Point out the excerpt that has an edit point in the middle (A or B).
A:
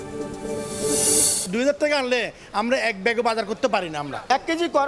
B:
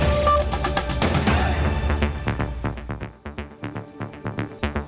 B